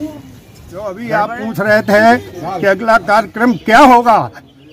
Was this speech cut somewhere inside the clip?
yes; 1 cut; at 0.9 s

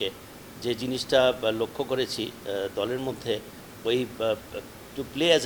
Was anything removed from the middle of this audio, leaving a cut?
no; 0 cuts

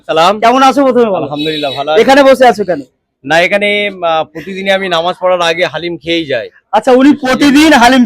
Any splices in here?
no; 0 cuts

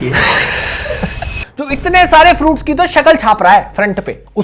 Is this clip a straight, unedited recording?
no; 1 cut; at 1.3 s

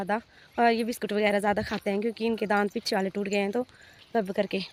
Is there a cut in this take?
no; 0 cuts

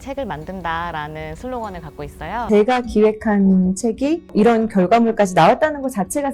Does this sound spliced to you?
yes; 2 cuts; at 2.4 s, 4.3 s

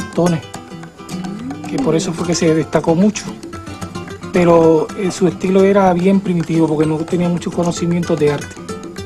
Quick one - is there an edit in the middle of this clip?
yes; 1 cut; at 5.6 s

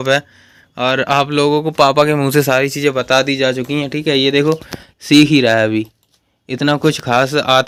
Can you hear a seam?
no; 0 cuts

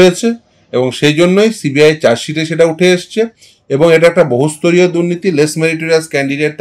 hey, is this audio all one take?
yes; 0 cuts

